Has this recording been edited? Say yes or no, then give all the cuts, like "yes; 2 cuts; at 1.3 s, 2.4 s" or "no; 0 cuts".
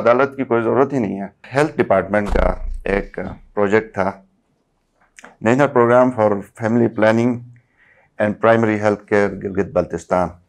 yes; 1 cut; at 1.4 s